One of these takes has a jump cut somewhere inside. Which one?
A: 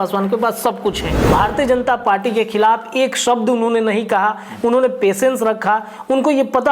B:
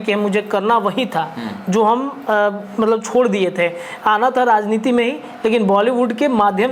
A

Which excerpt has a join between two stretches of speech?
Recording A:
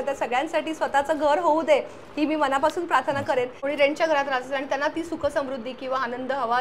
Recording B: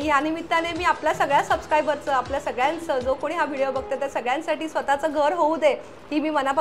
A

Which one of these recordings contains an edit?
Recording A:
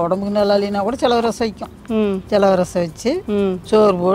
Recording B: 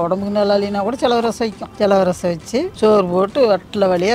B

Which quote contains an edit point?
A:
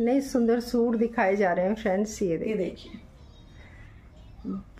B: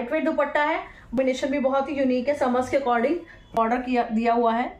B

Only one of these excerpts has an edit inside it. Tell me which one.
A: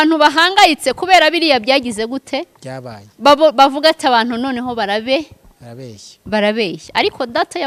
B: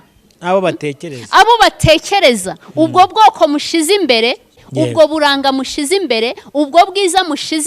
B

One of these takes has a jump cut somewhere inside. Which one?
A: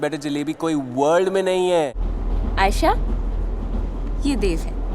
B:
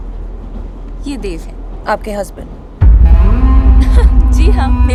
A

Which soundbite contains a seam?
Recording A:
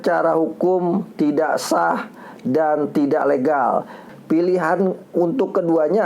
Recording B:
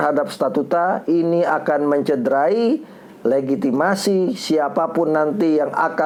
A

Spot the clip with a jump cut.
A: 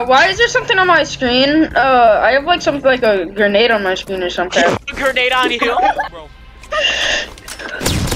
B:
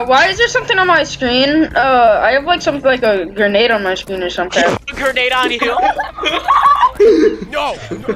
A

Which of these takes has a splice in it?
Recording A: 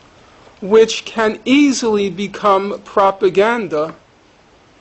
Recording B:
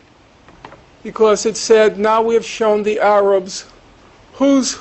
A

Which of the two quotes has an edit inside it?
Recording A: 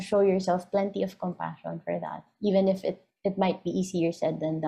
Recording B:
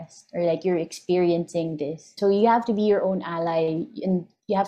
B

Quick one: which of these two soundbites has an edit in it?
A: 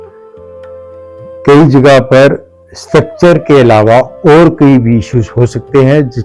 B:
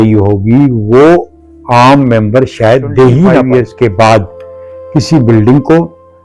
B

